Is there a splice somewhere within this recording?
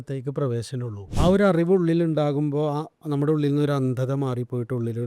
yes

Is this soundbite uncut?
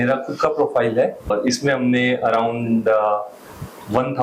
no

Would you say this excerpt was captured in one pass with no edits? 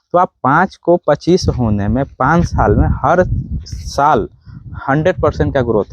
yes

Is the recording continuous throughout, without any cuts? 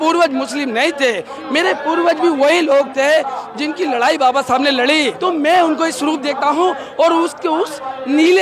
no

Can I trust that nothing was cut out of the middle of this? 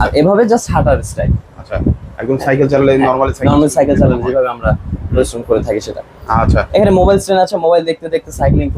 yes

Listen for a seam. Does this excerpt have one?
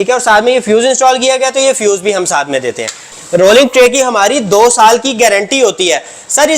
yes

